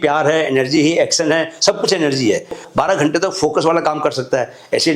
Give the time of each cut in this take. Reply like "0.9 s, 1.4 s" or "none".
2.6 s